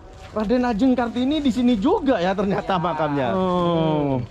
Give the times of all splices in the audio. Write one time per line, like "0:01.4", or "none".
0:03.1